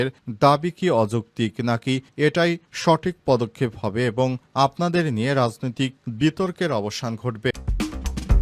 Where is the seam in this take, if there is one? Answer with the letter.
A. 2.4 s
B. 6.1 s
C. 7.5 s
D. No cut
C